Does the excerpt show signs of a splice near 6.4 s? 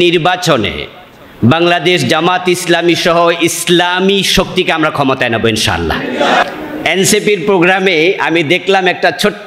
yes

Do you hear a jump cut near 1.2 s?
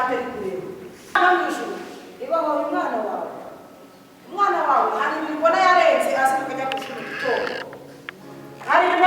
yes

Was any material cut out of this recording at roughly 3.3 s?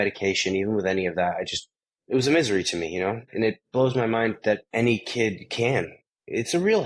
yes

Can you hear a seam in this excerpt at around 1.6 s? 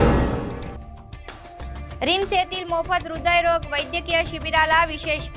yes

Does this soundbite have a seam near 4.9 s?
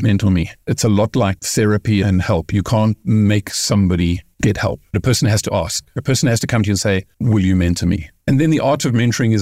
yes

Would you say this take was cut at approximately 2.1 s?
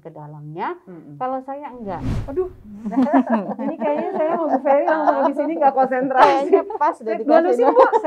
yes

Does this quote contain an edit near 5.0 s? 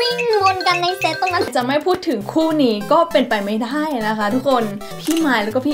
yes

